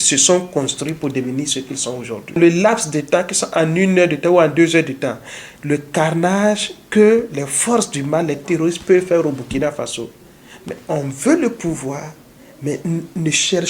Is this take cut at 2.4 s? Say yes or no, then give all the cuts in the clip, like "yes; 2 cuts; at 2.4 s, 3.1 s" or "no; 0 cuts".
yes; 1 cut; at 2.4 s